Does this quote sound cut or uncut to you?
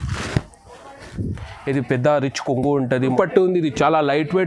cut